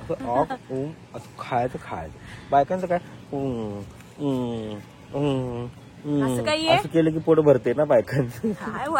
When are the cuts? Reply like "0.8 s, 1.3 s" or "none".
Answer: none